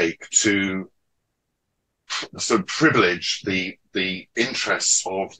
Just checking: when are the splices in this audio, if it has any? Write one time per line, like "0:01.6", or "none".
none